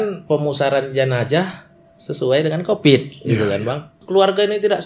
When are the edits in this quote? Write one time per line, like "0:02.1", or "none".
0:03.9